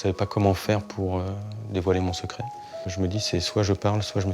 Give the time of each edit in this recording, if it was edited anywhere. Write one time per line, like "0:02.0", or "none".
0:02.9